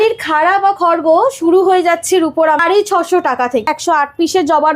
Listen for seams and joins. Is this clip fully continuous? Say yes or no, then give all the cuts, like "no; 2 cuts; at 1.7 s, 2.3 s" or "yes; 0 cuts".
no; 2 cuts; at 2.6 s, 3.7 s